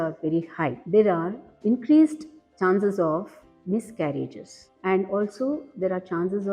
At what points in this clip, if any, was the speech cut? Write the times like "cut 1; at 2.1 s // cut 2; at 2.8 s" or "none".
cut 1; at 4.5 s